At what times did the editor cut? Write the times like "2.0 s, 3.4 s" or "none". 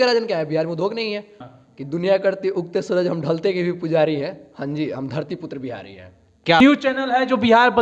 1.4 s, 6.6 s

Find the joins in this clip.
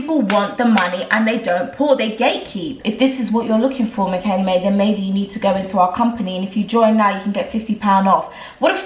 2.8 s

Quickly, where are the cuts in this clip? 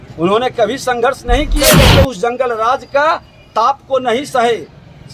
1.7 s

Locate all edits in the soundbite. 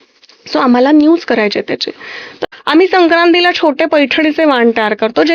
2.4 s

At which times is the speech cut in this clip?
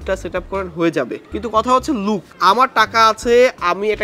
1.2 s, 2.3 s

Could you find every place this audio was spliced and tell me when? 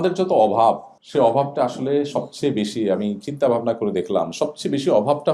0.9 s

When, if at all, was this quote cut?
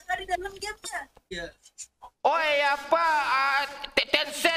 1.2 s

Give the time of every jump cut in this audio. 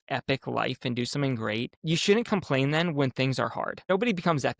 1.8 s, 3.9 s

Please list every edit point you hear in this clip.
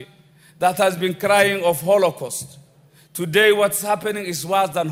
none

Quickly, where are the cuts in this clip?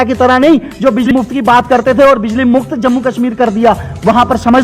1.1 s

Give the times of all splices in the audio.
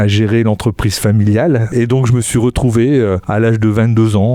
1.7 s, 3.2 s

